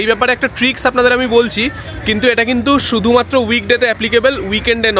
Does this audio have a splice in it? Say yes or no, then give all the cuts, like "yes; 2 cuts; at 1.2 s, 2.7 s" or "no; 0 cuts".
no; 0 cuts